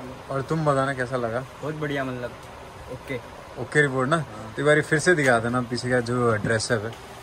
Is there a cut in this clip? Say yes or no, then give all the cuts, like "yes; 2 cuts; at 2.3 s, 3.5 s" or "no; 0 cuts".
no; 0 cuts